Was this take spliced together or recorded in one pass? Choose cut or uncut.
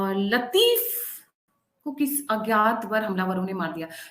uncut